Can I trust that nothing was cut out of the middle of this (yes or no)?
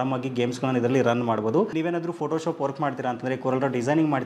no